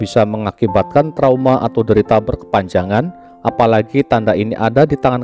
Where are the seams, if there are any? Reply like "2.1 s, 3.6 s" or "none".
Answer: none

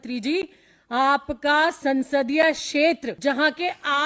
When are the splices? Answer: 3.1 s

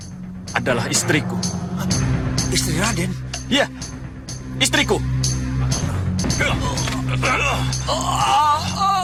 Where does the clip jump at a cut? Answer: none

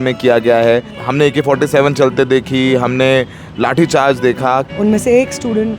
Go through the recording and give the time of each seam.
1.0 s, 4.7 s

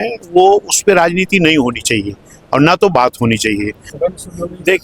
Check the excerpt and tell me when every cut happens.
3.8 s

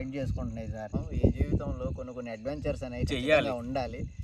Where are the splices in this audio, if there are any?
0.9 s

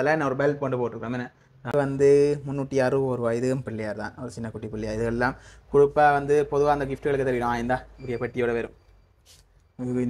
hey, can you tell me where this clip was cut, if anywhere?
1.7 s

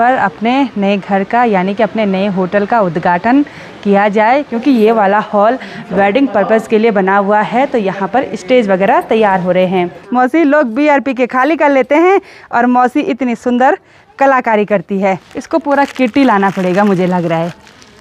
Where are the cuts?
4.5 s, 10.0 s, 15.3 s

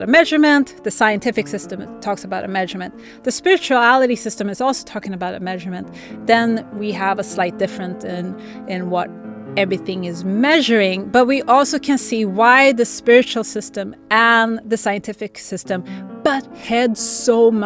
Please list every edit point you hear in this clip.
none

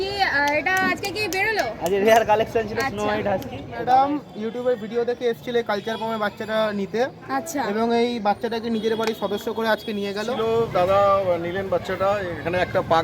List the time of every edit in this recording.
3.7 s, 10.2 s

